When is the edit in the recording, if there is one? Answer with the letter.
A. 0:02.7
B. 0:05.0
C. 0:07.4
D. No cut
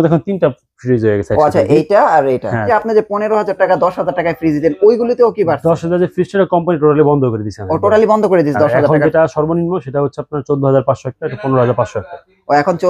A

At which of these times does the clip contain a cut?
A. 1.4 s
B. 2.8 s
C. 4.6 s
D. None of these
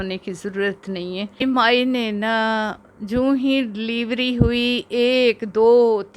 A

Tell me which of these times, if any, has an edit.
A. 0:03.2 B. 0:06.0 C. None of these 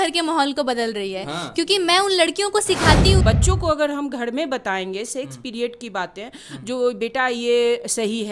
A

